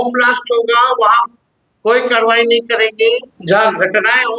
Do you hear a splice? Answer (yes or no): yes